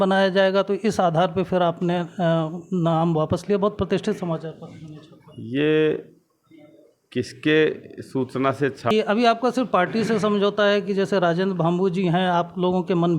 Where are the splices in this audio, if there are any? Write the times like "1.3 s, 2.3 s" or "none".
8.9 s